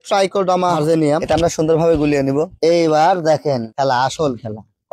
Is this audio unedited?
no; 1 cut; at 1.2 s

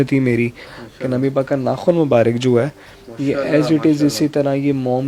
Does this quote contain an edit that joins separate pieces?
no; 0 cuts

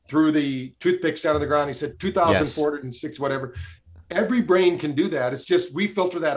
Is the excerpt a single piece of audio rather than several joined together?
no; 1 cut; at 1.9 s

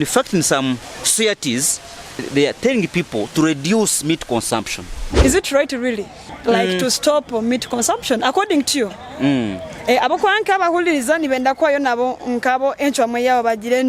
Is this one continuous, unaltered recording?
no; 3 cuts; at 1.0 s, 2.2 s, 5.1 s

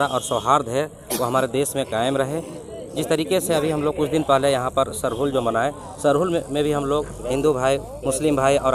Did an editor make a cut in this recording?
no; 0 cuts

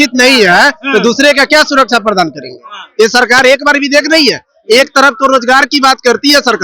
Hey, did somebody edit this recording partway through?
no; 0 cuts

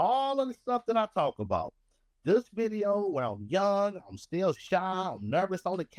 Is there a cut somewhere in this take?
no; 0 cuts

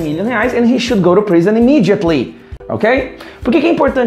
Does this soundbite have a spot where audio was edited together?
no; 0 cuts

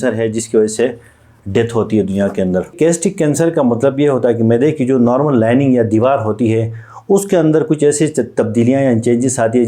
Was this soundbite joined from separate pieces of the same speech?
yes; 1 cut; at 2.7 s

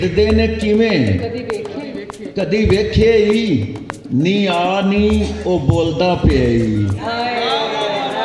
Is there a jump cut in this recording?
no; 0 cuts

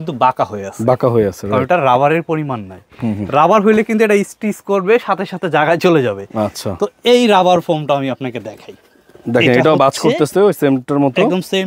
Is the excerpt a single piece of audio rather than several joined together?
no; 1 cut; at 1.6 s

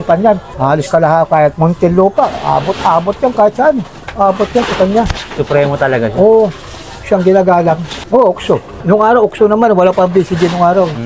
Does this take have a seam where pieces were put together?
no; 0 cuts

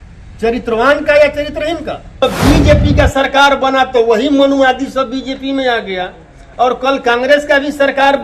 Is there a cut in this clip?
yes; 1 cut; at 2.2 s

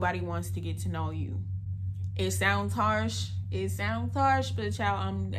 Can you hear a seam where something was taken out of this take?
no; 0 cuts

